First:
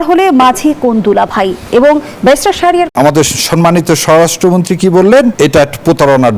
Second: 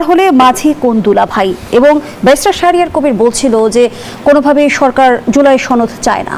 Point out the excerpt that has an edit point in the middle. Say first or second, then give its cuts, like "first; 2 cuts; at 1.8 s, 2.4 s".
first; 2 cuts; at 2.9 s, 5.3 s